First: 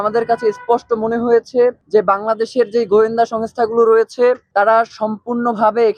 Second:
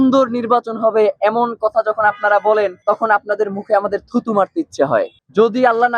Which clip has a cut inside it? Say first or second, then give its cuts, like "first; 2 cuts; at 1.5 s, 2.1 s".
second; 2 cuts; at 2.8 s, 5.1 s